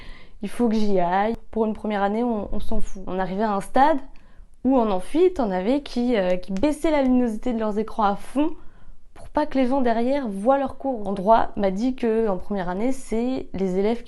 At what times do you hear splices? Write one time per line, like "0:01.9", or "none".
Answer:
0:01.4
0:02.9
0:11.1